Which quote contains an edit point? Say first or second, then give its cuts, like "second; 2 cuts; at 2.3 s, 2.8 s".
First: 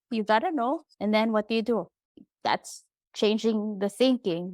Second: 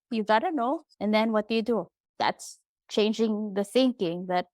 second; 1 cut; at 2.0 s